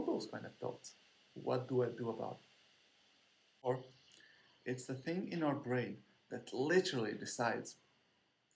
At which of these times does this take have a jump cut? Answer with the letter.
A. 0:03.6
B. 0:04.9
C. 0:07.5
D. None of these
A